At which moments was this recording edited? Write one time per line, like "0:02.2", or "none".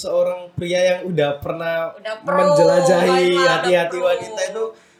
none